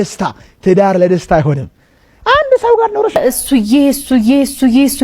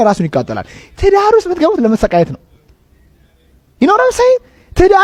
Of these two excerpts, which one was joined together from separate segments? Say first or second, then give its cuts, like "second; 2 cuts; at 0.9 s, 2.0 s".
first; 1 cut; at 3.1 s